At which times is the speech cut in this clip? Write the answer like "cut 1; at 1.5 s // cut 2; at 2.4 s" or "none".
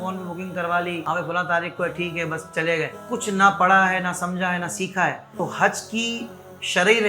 cut 1; at 1.0 s // cut 2; at 3.0 s // cut 3; at 5.3 s